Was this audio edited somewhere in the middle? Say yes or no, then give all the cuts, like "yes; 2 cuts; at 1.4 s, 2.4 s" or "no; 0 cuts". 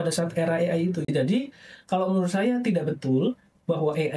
yes; 1 cut; at 1.0 s